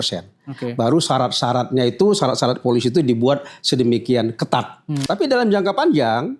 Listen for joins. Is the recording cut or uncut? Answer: cut